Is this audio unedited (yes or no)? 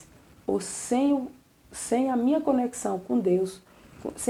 yes